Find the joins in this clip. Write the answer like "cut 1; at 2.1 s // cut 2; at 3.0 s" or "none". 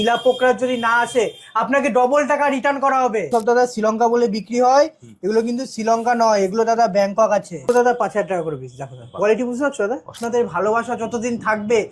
cut 1; at 3.3 s // cut 2; at 7.7 s // cut 3; at 10.2 s